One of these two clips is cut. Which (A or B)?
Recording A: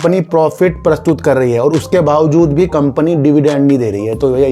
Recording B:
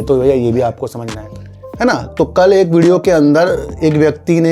B